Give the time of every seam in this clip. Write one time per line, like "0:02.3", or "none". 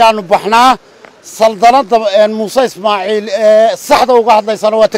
none